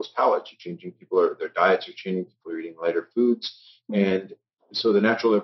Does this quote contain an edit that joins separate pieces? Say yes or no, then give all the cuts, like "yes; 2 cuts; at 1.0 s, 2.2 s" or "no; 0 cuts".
no; 0 cuts